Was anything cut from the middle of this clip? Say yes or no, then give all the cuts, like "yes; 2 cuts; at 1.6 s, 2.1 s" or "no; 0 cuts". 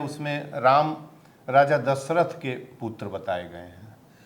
no; 0 cuts